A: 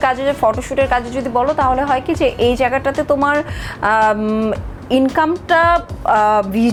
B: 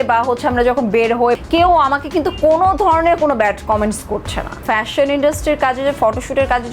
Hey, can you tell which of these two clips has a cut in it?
B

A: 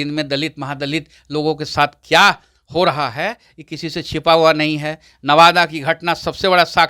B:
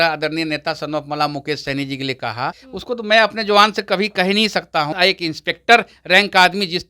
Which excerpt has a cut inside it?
B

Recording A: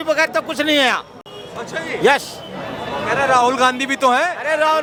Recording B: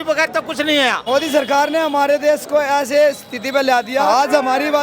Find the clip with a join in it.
B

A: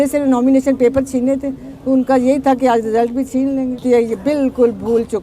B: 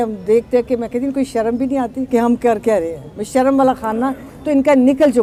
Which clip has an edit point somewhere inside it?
A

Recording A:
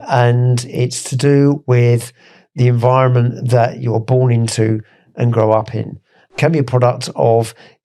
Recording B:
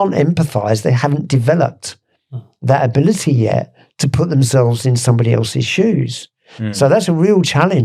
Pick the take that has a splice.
A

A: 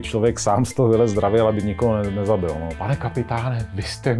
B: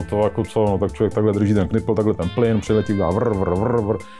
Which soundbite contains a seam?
A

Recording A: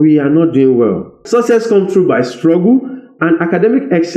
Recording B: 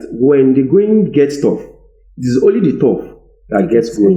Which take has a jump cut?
A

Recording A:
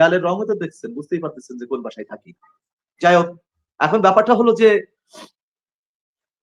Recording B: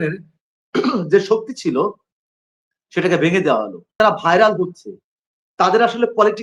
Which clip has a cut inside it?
B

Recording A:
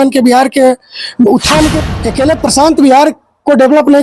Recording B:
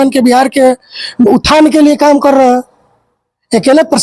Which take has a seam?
A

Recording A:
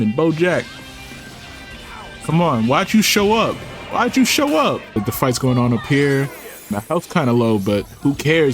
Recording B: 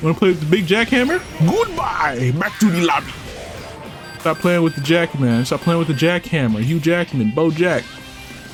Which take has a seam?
A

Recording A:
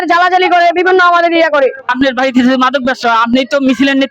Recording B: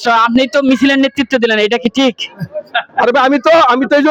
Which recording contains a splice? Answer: A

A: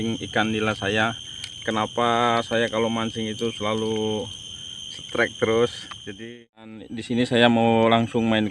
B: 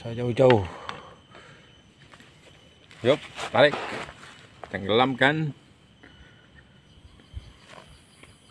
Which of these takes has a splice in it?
A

